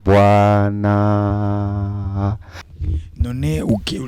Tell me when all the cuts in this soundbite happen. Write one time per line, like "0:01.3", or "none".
0:02.7